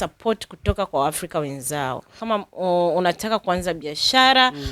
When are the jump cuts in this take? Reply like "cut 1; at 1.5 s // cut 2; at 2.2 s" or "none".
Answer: cut 1; at 2.2 s

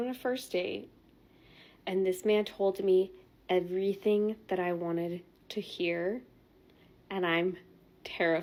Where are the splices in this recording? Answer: none

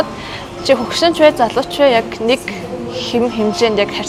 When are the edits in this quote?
none

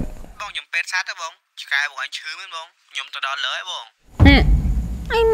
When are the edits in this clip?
none

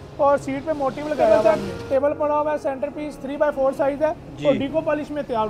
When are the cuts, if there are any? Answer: cut 1; at 1.4 s

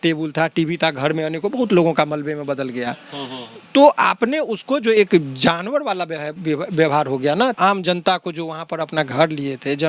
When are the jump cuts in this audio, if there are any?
cut 1; at 7.5 s

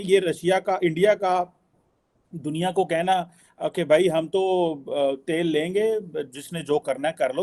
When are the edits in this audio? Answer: none

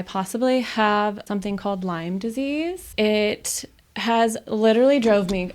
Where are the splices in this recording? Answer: cut 1; at 1.2 s // cut 2; at 2.9 s

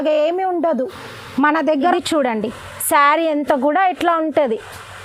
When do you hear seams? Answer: cut 1; at 1.9 s

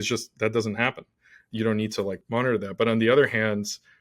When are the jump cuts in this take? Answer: cut 1; at 1.4 s // cut 2; at 2.2 s

